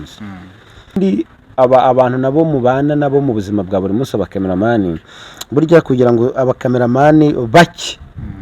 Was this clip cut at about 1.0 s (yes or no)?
yes